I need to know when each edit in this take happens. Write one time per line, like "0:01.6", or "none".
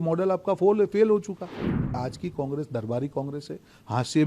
0:01.9